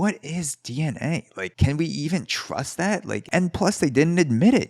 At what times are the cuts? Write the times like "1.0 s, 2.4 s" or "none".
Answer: 1.5 s, 3.2 s